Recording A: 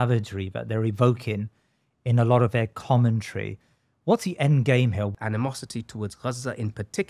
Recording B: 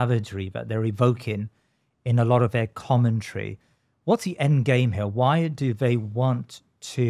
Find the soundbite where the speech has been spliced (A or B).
A